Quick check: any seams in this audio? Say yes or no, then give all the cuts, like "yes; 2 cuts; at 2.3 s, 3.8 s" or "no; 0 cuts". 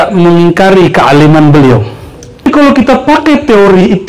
yes; 1 cut; at 2.5 s